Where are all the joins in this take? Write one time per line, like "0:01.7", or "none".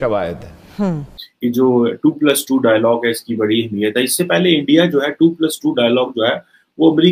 0:01.2